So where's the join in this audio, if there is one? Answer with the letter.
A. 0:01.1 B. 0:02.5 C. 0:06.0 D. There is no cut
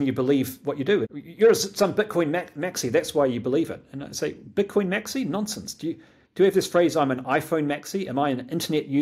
A